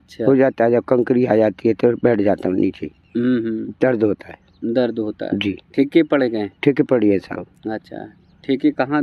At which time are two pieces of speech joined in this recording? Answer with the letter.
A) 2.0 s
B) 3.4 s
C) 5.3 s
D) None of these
D